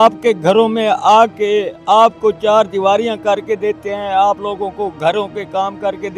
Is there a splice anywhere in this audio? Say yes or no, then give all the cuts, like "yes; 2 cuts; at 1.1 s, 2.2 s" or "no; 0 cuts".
no; 0 cuts